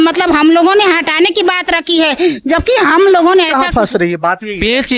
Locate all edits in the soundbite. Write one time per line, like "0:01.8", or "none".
0:03.6